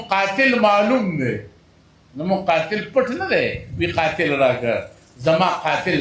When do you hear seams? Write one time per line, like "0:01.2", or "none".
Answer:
none